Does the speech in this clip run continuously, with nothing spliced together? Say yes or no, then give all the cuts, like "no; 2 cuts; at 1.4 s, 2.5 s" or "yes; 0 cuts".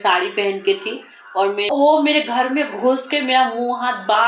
no; 1 cut; at 1.7 s